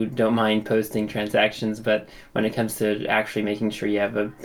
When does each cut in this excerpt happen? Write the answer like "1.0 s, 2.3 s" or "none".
none